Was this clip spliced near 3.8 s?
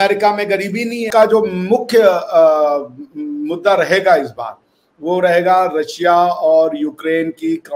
no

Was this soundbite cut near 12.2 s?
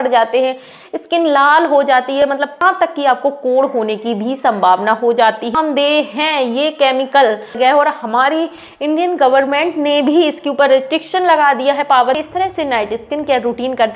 yes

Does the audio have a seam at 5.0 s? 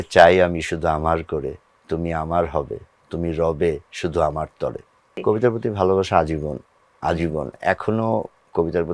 yes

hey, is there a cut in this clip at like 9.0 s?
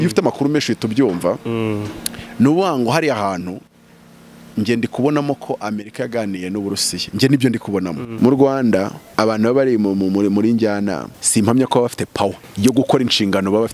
yes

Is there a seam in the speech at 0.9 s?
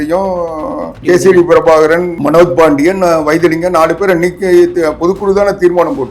yes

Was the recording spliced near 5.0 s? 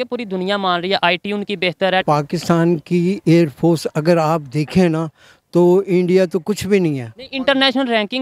no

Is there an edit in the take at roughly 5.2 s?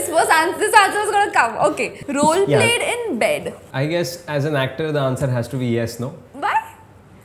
no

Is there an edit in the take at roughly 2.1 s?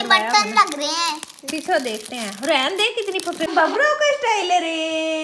no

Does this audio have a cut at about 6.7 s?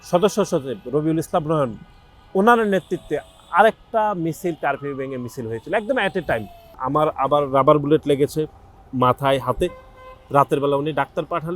yes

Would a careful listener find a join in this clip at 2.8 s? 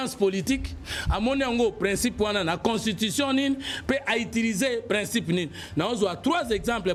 no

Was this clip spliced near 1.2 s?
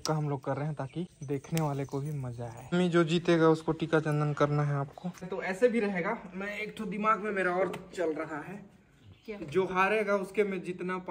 yes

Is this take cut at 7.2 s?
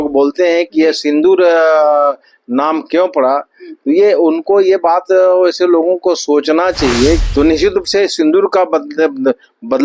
yes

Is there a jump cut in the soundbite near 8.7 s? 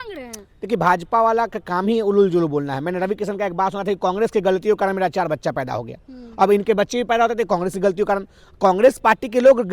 no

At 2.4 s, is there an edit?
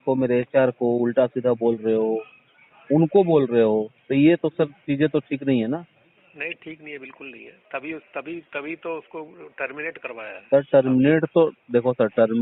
no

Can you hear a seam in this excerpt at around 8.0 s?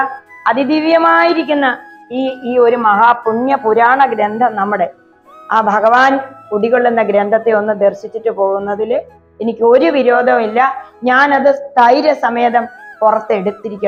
no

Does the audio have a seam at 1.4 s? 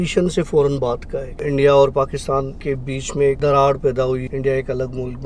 yes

